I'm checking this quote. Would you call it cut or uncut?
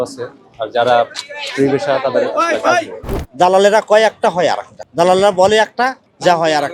cut